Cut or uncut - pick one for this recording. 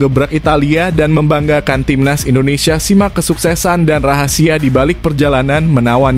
uncut